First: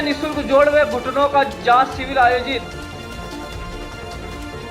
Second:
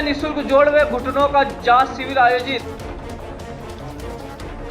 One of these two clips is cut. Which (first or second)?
second